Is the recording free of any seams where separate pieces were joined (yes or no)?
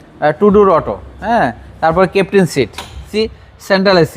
no